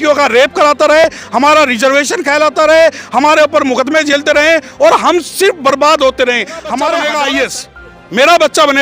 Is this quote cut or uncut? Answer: cut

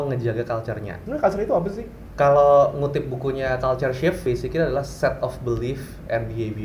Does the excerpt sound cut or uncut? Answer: cut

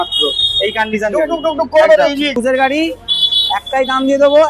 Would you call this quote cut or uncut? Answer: cut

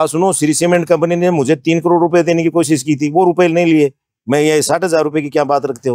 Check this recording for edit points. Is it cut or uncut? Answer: uncut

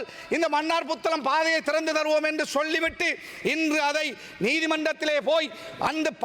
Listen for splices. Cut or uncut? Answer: cut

